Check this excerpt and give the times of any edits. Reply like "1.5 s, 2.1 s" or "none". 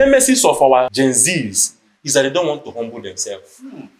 0.9 s

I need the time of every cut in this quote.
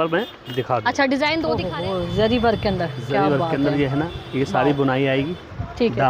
1.6 s

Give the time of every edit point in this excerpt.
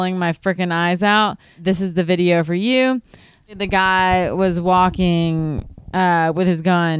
1.5 s, 3.6 s

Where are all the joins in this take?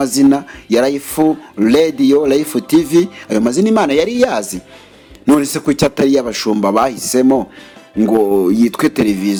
none

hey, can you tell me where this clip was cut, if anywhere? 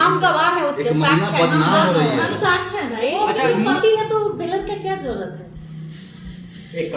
3.8 s

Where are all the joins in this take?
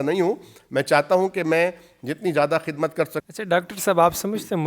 3.2 s

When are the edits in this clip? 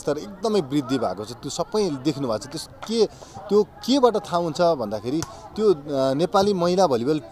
none

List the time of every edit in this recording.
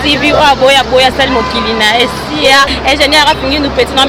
none

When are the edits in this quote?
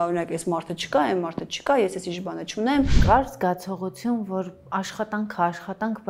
3.0 s

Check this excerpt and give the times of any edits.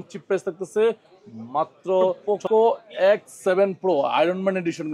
2.2 s

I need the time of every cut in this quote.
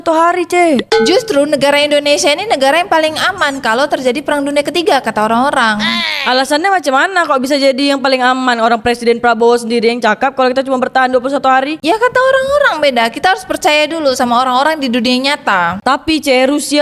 none

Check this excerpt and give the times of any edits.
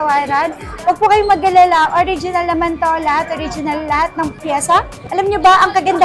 5.0 s

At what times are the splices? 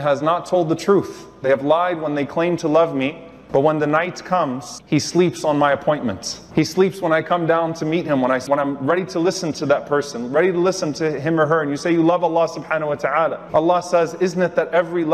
4.7 s, 8.4 s

